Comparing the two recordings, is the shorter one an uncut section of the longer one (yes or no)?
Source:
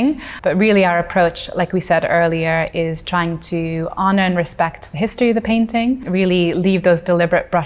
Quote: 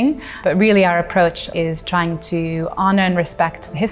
no